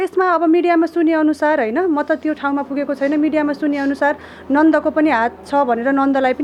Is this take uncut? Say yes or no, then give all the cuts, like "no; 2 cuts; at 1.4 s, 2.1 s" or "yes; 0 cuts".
yes; 0 cuts